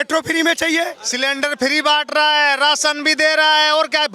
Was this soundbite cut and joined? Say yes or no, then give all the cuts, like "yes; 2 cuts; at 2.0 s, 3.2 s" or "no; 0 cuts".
yes; 1 cut; at 1.0 s